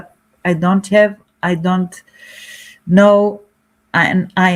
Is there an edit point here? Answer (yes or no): no